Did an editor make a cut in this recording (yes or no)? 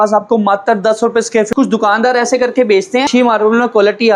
yes